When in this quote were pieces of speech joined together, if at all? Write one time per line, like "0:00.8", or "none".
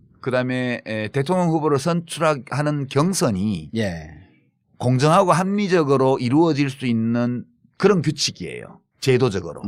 none